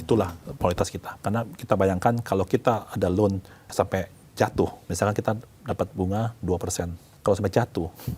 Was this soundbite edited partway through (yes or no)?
yes